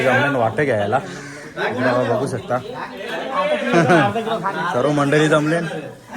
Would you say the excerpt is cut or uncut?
uncut